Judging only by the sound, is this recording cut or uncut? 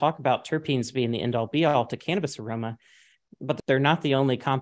cut